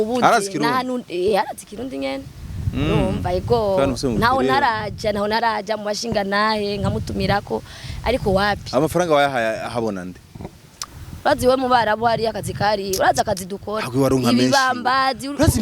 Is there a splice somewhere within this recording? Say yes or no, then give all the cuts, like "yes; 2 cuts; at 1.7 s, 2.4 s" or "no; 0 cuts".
yes; 1 cut; at 10.8 s